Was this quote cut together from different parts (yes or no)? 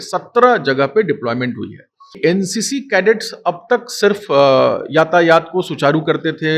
yes